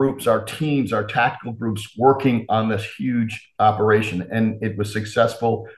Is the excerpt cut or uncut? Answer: uncut